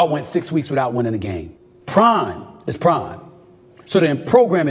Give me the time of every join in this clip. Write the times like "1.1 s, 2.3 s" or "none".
1.2 s